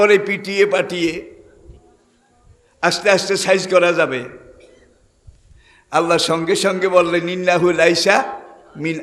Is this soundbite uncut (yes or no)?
yes